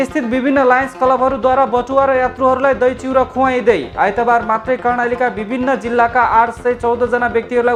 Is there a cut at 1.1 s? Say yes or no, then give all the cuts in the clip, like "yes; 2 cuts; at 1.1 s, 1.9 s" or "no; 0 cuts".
no; 0 cuts